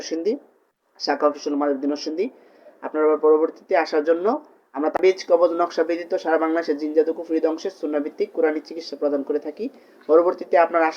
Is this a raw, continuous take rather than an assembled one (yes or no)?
no